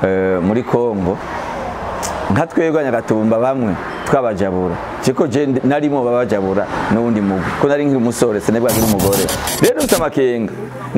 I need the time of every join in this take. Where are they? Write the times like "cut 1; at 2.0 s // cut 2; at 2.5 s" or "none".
cut 1; at 9.4 s